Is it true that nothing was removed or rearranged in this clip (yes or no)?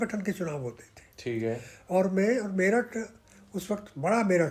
yes